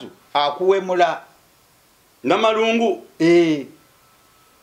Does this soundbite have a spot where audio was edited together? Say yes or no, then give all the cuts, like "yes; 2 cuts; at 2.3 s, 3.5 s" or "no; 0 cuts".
no; 0 cuts